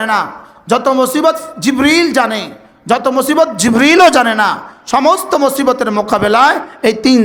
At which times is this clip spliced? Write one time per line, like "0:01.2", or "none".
none